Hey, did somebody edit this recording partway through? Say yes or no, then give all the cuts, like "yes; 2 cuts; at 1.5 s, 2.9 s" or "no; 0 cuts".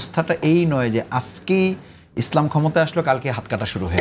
no; 0 cuts